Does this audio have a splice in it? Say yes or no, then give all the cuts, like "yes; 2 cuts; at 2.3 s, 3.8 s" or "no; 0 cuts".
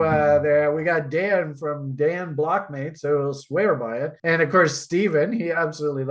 yes; 1 cut; at 4.1 s